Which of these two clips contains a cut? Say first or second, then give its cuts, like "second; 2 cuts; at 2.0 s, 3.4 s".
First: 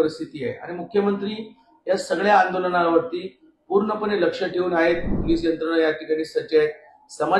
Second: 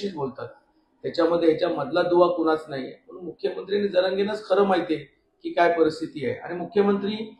first; 1 cut; at 5.1 s